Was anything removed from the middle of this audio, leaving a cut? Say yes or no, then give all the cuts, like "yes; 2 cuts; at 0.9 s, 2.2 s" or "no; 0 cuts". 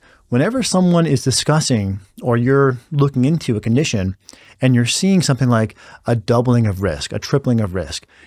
no; 0 cuts